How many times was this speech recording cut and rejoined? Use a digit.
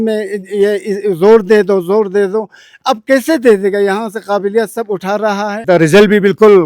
1